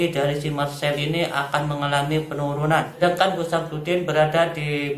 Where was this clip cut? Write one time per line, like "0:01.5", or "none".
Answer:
0:03.0